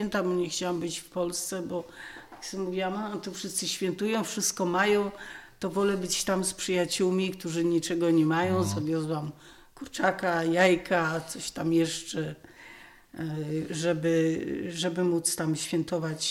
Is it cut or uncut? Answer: uncut